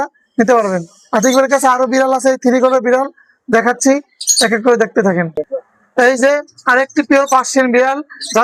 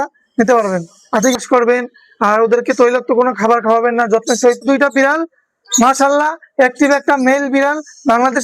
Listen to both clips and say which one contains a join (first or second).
second